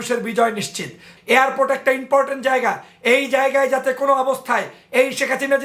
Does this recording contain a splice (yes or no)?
yes